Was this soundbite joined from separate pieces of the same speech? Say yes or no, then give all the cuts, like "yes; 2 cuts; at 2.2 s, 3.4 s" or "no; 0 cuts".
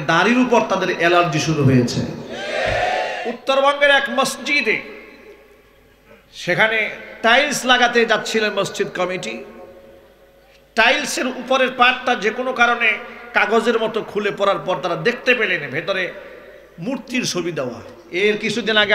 yes; 2 cuts; at 3.3 s, 17.9 s